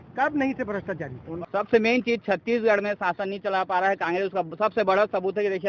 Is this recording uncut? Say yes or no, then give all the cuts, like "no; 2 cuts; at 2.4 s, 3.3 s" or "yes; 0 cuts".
no; 1 cut; at 1.3 s